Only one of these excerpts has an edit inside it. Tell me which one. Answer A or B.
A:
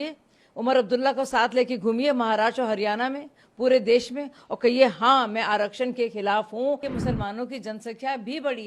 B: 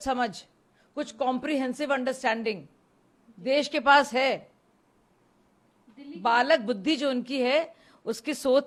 A